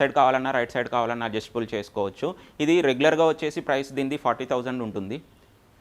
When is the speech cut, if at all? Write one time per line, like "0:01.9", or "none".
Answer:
none